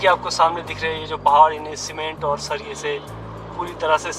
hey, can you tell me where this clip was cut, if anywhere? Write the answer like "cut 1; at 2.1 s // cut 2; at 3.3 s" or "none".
none